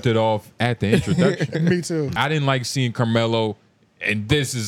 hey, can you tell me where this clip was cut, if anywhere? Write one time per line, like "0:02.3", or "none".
0:02.1

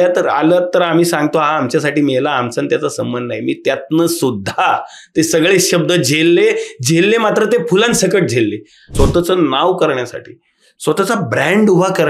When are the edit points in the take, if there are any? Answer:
0:08.9

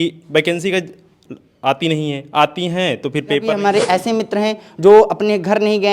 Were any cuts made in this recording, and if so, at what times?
0:03.4

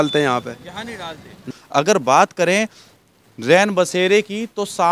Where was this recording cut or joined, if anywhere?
0:01.6

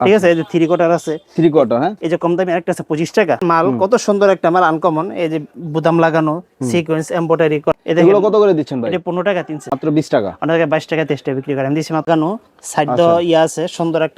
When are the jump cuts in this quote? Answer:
0:03.4
0:07.7
0:09.6
0:12.1

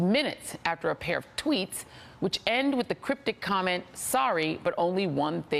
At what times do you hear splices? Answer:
0:03.2

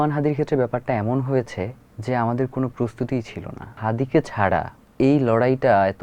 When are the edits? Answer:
0:01.9
0:03.8
0:04.8

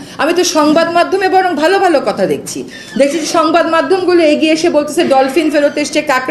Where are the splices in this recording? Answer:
none

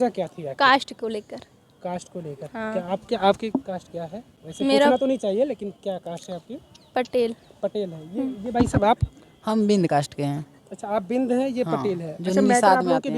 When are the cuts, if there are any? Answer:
none

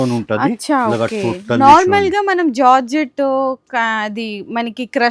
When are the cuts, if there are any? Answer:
none

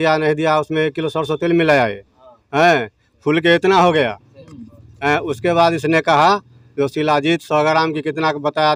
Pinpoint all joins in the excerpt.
none

